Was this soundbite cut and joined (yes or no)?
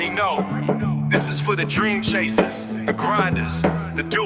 no